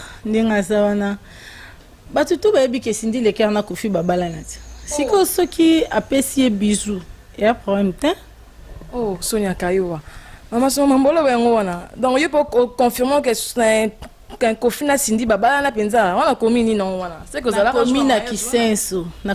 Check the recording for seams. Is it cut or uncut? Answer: uncut